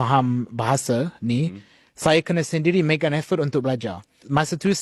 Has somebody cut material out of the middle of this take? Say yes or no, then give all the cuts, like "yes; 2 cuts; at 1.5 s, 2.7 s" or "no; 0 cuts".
no; 0 cuts